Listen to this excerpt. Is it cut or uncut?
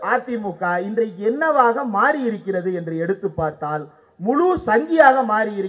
uncut